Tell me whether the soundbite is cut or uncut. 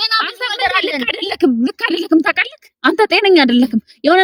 uncut